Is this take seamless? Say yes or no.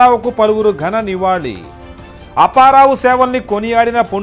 yes